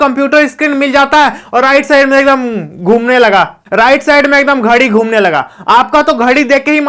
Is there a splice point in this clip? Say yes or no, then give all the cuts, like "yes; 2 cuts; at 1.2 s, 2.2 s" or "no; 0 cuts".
no; 0 cuts